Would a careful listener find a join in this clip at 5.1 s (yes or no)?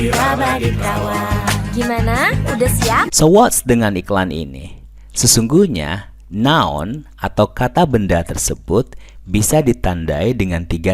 no